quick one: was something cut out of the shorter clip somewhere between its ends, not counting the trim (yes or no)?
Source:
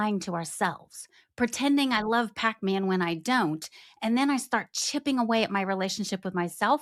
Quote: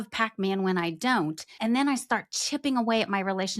yes